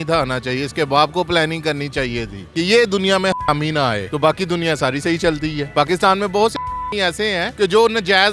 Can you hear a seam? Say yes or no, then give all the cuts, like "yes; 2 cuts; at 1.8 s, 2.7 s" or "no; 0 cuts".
no; 0 cuts